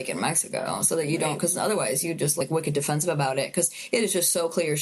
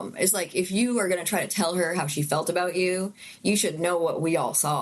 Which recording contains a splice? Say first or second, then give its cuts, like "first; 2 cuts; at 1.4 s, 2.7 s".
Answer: first; 1 cut; at 2.4 s